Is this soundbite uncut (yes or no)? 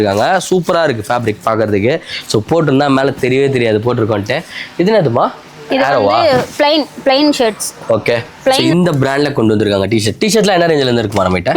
no